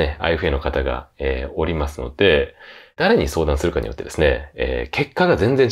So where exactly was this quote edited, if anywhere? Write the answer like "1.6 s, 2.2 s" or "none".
none

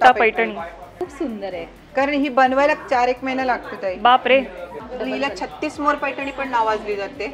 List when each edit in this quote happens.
1.0 s, 4.8 s

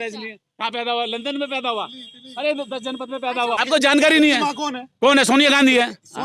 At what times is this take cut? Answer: 3.6 s

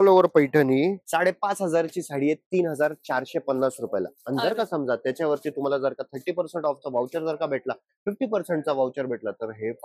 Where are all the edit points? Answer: 1.0 s

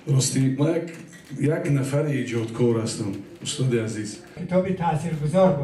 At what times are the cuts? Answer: 4.4 s

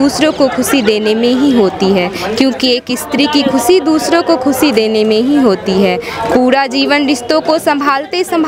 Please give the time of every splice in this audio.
none

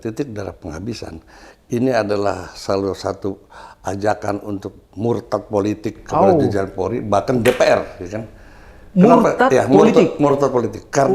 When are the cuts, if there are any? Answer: none

